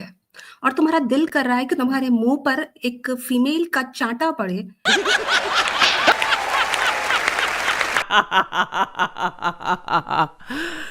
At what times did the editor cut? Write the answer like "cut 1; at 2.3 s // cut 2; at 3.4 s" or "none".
cut 1; at 4.7 s